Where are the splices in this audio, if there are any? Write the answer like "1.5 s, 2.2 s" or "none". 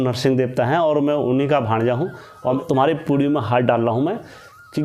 2.6 s